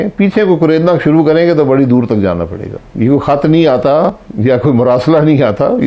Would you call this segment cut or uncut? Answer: cut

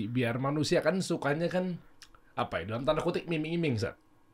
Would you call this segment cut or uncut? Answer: uncut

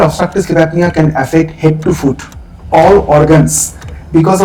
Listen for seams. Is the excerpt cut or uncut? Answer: uncut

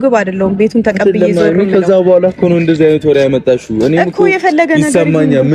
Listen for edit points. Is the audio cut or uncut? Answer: uncut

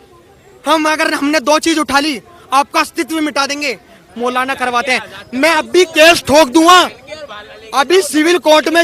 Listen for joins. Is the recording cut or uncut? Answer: cut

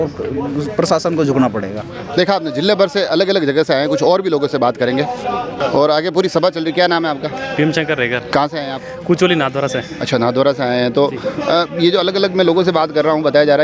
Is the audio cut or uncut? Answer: uncut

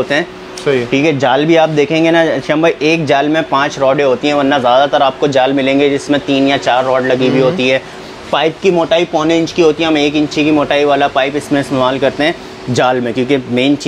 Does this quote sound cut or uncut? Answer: uncut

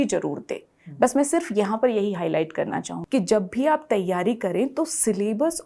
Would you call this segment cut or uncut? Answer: cut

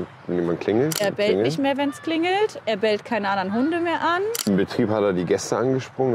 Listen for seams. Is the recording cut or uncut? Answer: cut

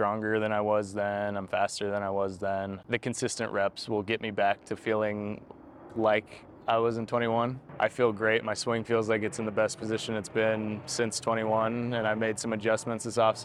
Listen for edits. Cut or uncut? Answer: cut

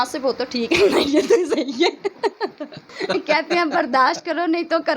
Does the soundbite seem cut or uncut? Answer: cut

